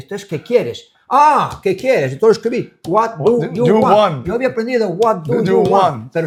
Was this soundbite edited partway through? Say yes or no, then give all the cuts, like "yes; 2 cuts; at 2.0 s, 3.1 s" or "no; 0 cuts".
no; 0 cuts